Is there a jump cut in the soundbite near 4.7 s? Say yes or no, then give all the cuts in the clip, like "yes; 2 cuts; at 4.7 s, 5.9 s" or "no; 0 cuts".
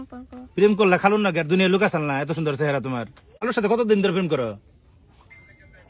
no; 1 cut; at 3.5 s